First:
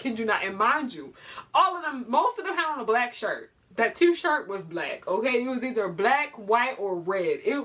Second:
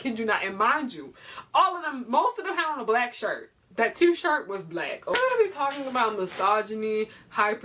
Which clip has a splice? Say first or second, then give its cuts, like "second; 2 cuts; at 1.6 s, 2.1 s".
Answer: second; 1 cut; at 5.1 s